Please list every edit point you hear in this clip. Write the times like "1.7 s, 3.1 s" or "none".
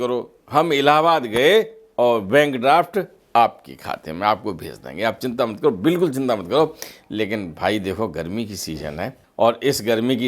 9.2 s